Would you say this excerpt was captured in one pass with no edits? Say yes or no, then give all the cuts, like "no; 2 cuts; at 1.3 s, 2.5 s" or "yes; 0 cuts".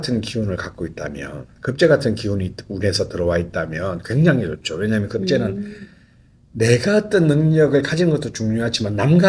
yes; 0 cuts